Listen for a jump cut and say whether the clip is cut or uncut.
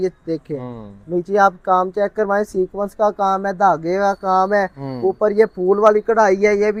uncut